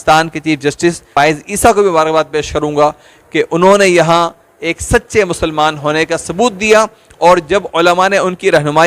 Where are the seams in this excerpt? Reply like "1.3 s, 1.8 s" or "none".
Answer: 1.1 s